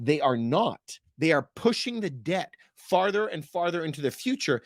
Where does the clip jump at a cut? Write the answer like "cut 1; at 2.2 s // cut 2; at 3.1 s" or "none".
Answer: none